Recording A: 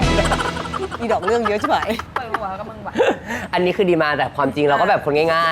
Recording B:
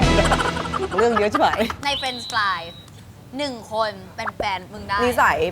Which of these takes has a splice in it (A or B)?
B